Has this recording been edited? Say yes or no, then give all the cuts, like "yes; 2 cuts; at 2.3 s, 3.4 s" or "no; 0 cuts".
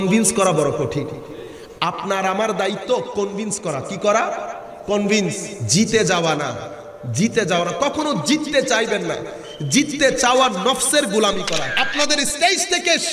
yes; 1 cut; at 11.7 s